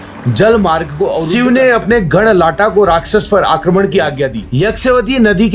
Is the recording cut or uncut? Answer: cut